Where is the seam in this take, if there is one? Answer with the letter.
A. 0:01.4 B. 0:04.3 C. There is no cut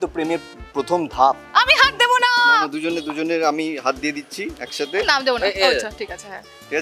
A